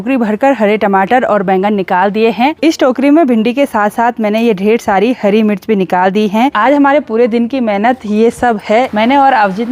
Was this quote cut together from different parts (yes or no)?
yes